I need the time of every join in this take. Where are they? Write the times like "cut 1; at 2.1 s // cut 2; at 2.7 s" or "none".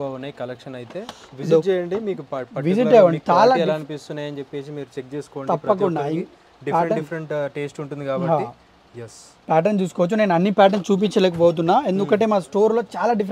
none